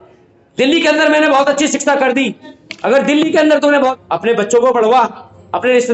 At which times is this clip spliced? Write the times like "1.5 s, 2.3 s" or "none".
3.9 s

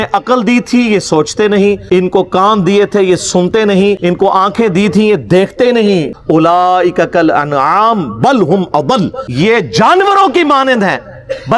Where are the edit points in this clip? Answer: 1.8 s, 4.0 s, 6.1 s, 9.2 s

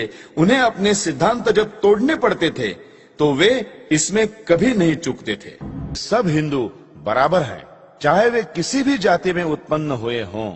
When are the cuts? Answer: 6.0 s

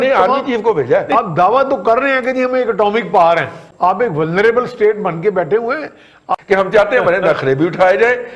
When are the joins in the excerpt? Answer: 1.1 s, 3.6 s, 6.3 s

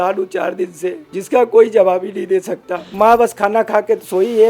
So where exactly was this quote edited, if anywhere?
1.1 s, 2.8 s

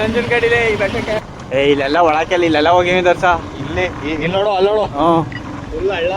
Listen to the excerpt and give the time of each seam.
1.2 s

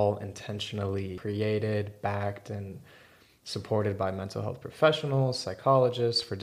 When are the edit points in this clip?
1.2 s

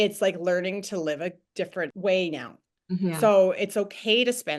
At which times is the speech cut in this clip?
1.9 s

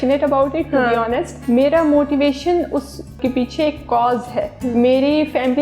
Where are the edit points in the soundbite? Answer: 1.3 s, 3.2 s, 4.6 s

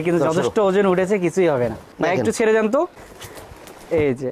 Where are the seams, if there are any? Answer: 1.9 s

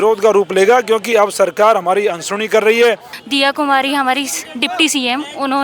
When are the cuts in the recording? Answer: 3.1 s

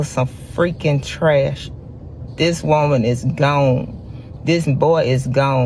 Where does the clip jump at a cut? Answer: none

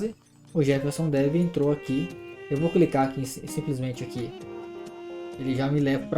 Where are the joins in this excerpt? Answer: 2.3 s

